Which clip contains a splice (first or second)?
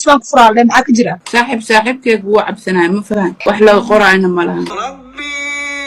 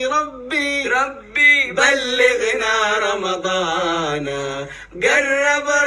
first